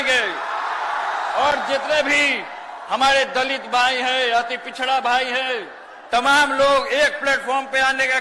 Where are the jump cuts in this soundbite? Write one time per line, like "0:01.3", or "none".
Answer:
none